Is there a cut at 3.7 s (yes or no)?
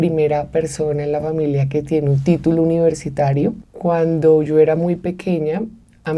yes